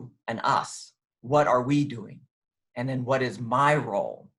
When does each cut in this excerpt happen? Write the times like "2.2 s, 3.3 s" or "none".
none